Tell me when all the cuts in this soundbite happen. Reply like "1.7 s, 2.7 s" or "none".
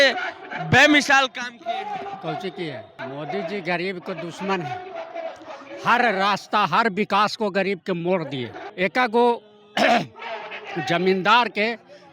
2.9 s, 8.6 s